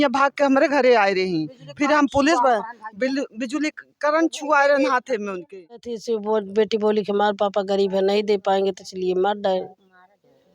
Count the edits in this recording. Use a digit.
1